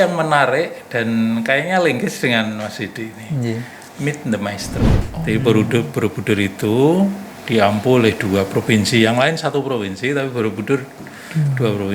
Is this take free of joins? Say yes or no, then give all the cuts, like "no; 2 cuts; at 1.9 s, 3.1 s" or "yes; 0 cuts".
no; 1 cut; at 5.1 s